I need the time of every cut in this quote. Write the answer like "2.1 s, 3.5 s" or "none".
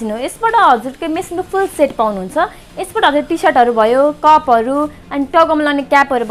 none